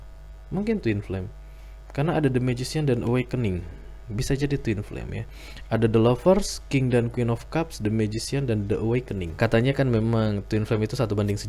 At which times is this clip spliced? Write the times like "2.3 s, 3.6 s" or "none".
9.2 s